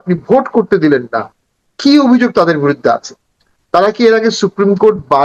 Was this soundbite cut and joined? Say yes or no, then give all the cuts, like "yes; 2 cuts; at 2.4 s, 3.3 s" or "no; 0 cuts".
no; 0 cuts